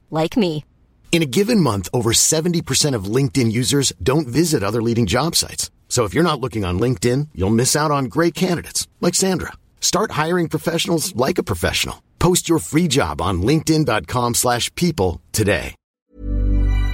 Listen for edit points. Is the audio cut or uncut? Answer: cut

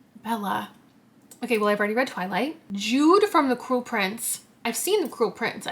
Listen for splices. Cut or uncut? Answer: cut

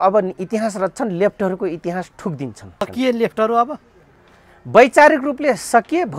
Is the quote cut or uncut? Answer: cut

